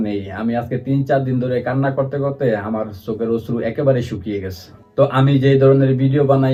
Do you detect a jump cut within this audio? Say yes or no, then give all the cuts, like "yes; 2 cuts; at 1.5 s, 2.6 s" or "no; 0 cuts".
no; 0 cuts